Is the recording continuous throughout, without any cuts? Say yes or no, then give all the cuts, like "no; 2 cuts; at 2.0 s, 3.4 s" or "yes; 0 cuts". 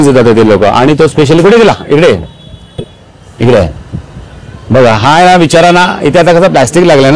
yes; 0 cuts